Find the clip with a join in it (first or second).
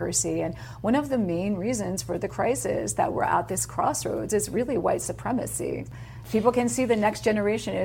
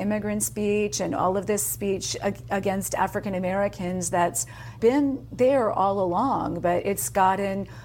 second